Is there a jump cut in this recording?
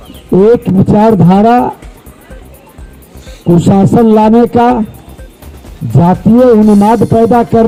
no; 0 cuts

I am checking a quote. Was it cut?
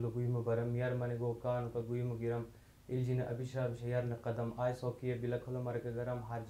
no; 0 cuts

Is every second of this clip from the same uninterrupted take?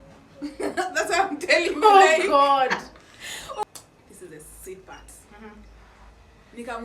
no; 1 cut; at 3.6 s

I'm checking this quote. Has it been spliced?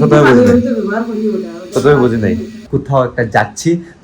yes; 1 cut; at 2.6 s

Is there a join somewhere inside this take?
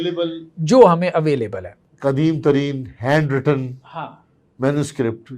no; 0 cuts

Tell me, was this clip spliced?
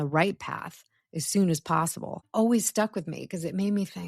yes; 1 cut; at 2.3 s

